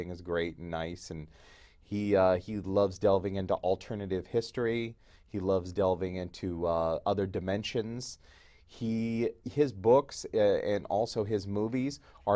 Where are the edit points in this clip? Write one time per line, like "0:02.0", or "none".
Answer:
0:08.0